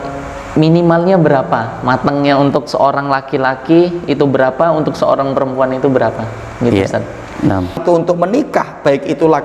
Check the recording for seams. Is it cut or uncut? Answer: cut